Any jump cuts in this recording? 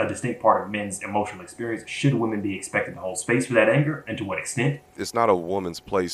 yes; 1 cut; at 5.0 s

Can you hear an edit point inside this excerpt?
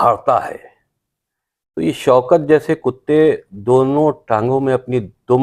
no; 0 cuts

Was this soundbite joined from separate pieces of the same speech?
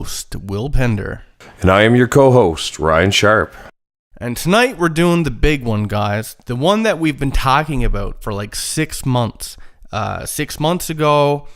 yes; 1 cut; at 6.7 s

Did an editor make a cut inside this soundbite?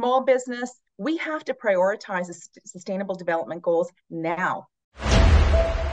yes; 1 cut; at 4.6 s

